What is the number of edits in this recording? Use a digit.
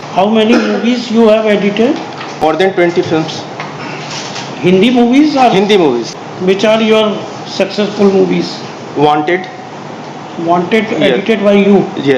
2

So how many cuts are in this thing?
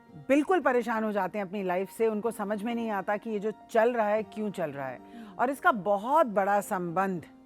0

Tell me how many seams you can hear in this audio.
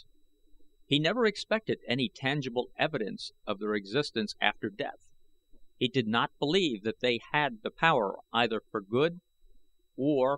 1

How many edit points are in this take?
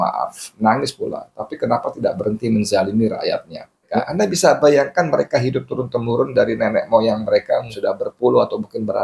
2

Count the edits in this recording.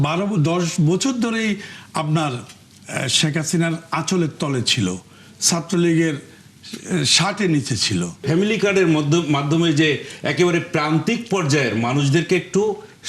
1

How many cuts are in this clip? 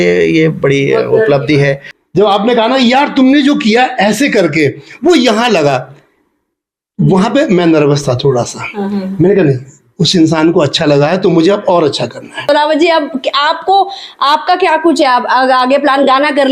2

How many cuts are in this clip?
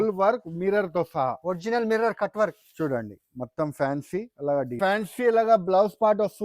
1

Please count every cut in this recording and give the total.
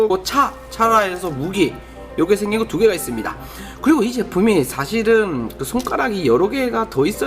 1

